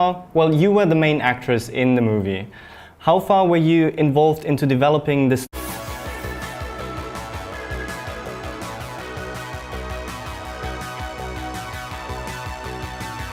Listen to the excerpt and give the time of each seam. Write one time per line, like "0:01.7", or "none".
none